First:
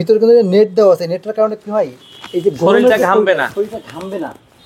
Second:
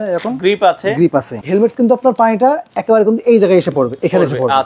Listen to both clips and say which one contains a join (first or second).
second